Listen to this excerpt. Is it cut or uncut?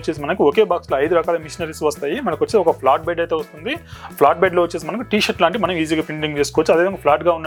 uncut